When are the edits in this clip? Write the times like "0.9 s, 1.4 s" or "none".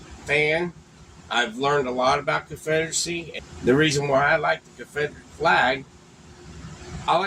3.3 s